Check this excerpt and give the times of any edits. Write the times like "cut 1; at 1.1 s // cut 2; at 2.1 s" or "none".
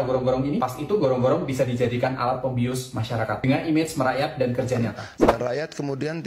cut 1; at 5.1 s